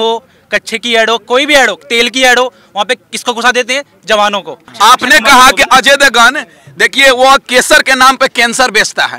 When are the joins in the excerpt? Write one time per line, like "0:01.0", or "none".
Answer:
0:04.6

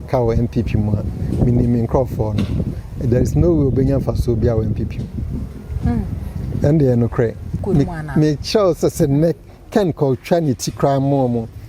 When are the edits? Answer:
0:07.5

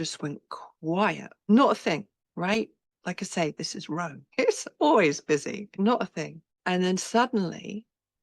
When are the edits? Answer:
0:01.5
0:02.2
0:02.9
0:04.2
0:05.7
0:06.4

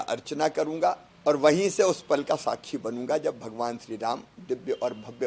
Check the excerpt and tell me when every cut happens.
0:01.1

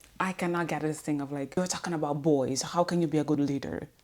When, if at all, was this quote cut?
0:01.6

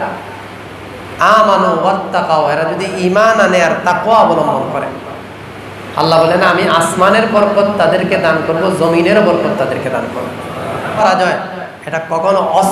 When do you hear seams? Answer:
0:11.0

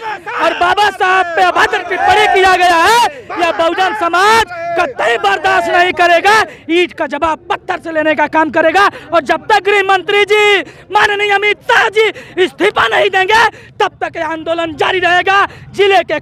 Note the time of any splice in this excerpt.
none

